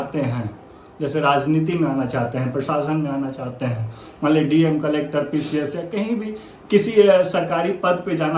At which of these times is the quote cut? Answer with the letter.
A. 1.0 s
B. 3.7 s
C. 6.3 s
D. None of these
D